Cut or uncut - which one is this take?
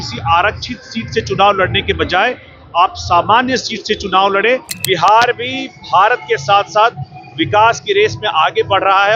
cut